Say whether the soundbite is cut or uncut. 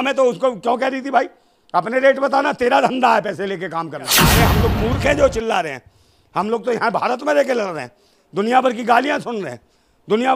cut